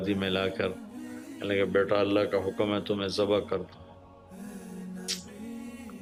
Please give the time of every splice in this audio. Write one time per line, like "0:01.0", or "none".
none